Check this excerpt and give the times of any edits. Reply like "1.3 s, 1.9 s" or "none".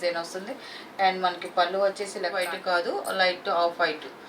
2.4 s